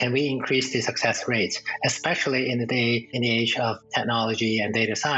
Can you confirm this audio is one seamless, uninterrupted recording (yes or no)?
yes